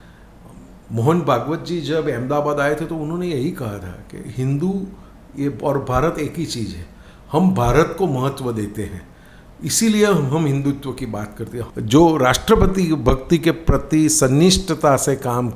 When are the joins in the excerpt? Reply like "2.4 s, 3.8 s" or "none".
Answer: 11.6 s